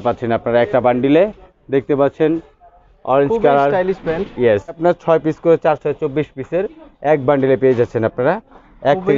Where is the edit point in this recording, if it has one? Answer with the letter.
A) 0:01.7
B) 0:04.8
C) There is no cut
B